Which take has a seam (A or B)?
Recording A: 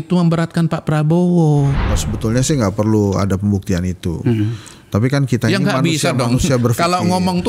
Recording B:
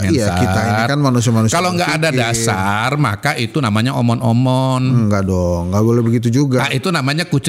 A